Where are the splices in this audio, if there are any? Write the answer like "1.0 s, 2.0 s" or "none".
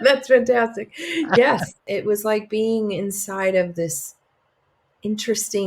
1.8 s